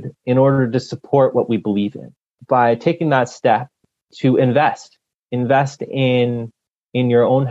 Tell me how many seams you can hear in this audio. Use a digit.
2